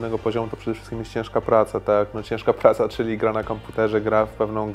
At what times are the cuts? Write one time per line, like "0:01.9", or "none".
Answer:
none